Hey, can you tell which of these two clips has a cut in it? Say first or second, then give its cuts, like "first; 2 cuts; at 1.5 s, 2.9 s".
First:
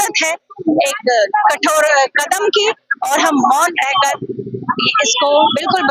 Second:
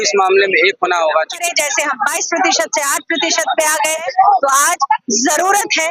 second; 2 cuts; at 1.4 s, 4.0 s